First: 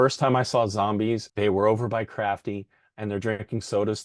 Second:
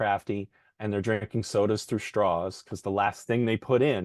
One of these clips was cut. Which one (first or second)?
first